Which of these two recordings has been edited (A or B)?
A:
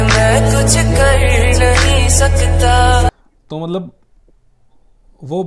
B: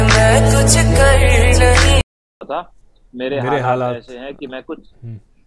B